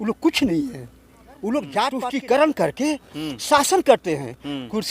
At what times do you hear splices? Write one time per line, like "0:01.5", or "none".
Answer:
0:02.0